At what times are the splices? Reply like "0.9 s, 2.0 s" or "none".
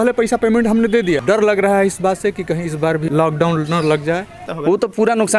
1.2 s, 3.1 s, 4.5 s